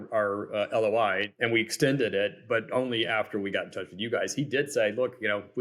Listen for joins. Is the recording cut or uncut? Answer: cut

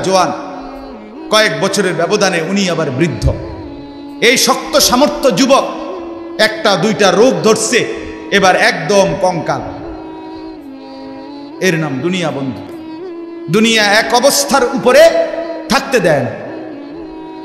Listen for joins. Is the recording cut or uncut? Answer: uncut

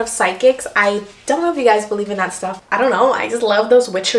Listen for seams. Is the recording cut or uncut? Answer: uncut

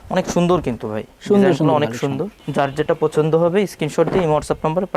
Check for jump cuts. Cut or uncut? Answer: uncut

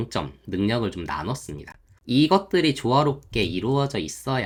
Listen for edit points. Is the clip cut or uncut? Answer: uncut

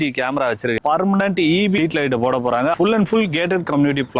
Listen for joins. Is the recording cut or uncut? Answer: cut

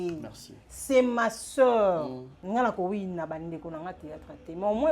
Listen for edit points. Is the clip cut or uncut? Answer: cut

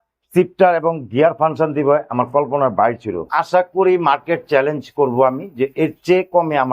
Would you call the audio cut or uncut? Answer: cut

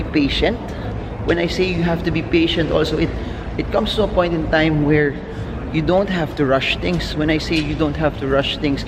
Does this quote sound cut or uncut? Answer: uncut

